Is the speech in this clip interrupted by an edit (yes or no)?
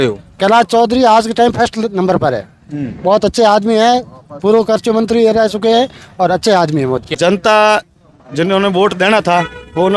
yes